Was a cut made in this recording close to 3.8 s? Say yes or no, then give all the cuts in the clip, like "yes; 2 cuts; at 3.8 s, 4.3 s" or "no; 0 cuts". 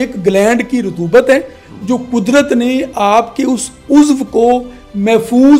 no; 0 cuts